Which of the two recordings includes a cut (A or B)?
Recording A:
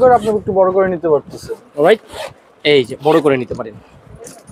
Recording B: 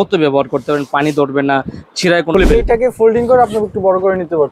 B